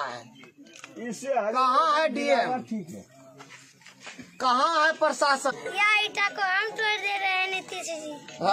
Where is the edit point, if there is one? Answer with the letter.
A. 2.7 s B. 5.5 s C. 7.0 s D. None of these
B